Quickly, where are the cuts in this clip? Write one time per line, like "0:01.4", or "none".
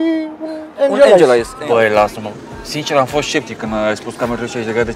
0:01.5